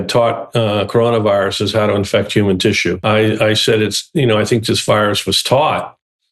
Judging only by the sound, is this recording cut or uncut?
cut